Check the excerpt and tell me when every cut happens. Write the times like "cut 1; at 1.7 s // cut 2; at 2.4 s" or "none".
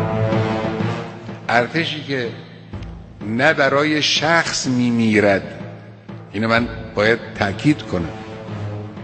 cut 1; at 1.2 s